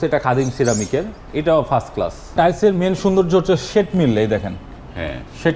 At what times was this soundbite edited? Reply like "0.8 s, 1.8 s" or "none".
2.3 s